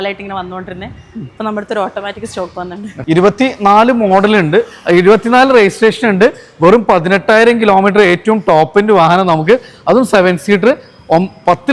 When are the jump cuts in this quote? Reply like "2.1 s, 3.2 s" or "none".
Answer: 2.9 s